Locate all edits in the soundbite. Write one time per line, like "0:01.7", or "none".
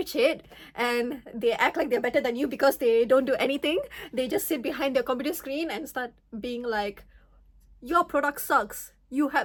none